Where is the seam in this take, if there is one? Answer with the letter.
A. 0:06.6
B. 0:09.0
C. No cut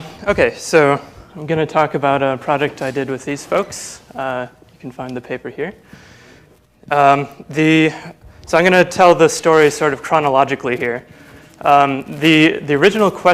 B